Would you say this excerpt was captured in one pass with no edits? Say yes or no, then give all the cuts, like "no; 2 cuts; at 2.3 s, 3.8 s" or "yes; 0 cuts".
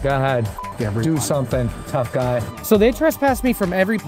no; 1 cut; at 2.5 s